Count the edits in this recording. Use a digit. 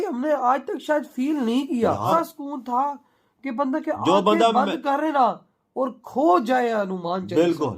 1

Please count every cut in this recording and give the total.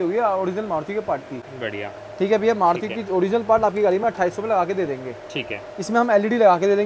0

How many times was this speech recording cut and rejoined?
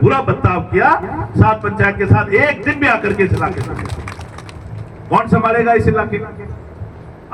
0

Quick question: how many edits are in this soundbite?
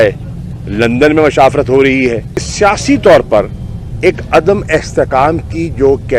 1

